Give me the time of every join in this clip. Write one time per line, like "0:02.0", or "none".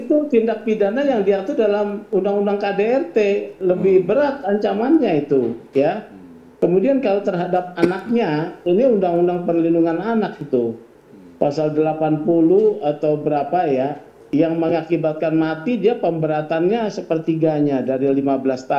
none